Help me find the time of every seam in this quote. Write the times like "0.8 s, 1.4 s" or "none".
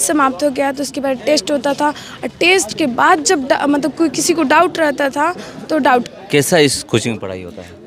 6.1 s